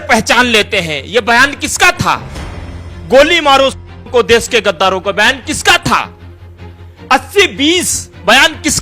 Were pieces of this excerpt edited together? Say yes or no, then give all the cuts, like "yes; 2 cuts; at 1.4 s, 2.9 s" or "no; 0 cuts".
no; 0 cuts